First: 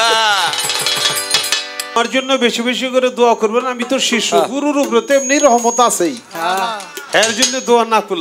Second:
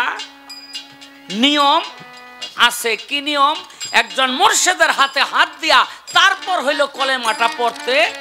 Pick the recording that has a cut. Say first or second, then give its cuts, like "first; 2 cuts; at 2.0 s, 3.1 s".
first; 1 cut; at 2.0 s